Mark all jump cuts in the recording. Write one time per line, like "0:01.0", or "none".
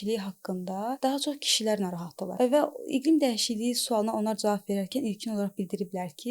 0:01.0
0:02.2